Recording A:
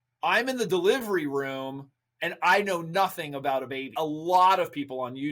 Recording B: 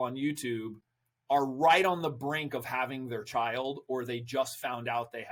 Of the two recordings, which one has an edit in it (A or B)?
A